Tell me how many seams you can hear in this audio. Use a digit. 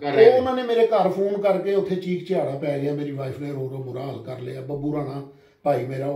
0